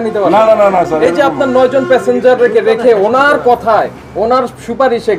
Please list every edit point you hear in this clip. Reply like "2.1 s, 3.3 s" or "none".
none